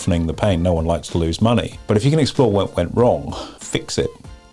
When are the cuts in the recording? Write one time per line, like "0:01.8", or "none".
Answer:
0:01.7
0:03.5